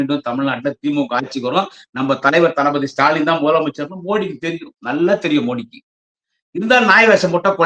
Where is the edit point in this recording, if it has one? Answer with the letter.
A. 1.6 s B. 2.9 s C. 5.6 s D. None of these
D